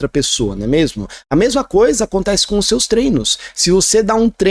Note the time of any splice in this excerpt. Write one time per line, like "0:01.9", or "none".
none